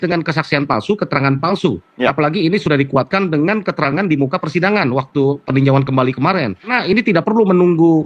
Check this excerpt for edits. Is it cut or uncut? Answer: cut